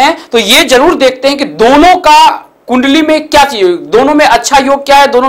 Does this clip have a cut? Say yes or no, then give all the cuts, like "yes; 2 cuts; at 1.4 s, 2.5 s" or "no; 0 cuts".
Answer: no; 0 cuts